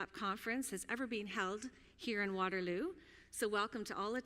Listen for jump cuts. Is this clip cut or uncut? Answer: cut